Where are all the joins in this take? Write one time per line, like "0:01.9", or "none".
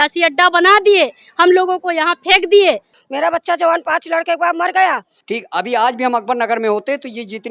0:03.0
0:05.1